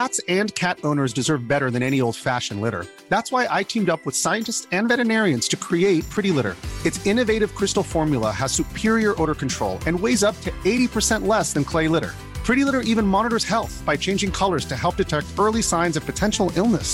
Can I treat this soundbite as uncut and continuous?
yes; 0 cuts

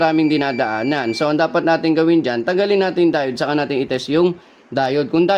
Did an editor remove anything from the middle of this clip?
no; 0 cuts

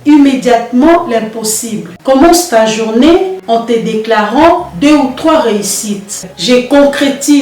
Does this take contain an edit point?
yes; 2 cuts; at 1.9 s, 6.2 s

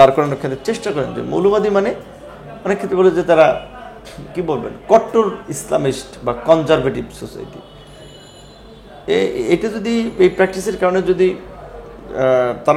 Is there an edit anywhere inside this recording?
no; 0 cuts

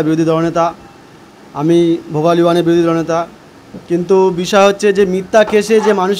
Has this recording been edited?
no; 0 cuts

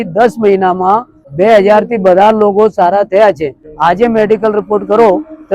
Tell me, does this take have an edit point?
yes; 2 cuts; at 1.2 s, 3.6 s

